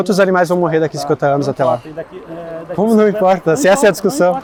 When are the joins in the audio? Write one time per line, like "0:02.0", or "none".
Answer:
none